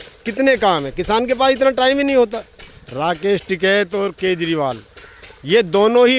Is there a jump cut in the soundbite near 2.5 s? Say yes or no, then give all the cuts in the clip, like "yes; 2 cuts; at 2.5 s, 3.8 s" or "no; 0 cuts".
yes; 1 cut; at 2.5 s